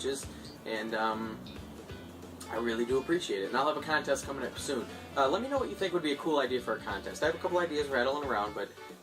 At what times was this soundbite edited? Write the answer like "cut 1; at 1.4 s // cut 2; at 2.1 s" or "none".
cut 1; at 6.7 s